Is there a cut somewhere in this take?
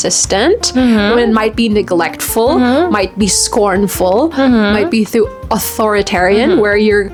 no; 0 cuts

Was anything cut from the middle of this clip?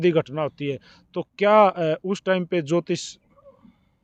no; 0 cuts

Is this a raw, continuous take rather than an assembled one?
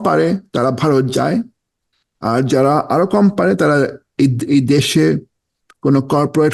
yes; 0 cuts

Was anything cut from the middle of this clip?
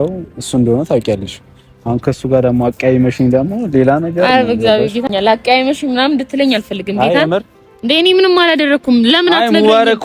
no; 0 cuts

